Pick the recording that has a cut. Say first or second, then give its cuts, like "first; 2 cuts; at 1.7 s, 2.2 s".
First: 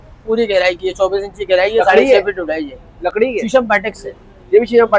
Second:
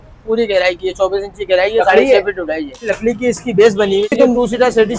second; 2 cuts; at 2.9 s, 4.1 s